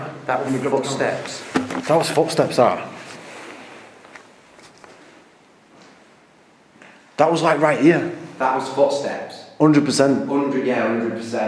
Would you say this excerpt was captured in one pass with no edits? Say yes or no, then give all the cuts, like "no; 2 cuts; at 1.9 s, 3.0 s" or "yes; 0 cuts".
yes; 0 cuts